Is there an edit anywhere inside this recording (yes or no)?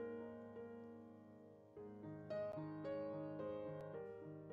no